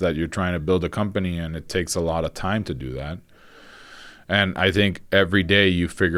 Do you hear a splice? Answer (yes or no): no